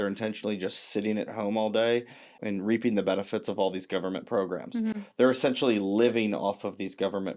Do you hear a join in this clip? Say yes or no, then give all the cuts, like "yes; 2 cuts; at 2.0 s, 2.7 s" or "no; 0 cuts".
yes; 1 cut; at 2.4 s